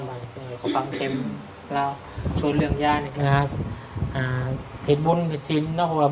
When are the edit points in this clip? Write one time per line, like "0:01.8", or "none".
0:03.1